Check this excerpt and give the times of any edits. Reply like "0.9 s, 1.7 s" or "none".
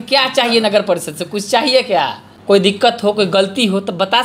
2.3 s